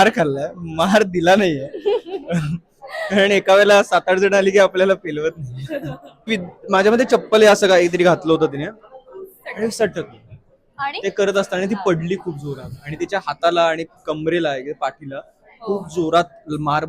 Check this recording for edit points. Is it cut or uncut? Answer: cut